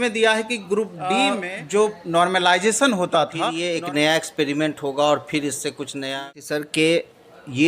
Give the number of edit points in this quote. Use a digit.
3